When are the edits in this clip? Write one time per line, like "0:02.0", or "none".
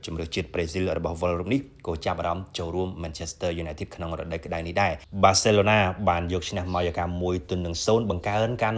0:05.0